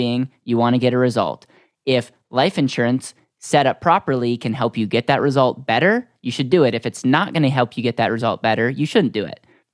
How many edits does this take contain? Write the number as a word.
zero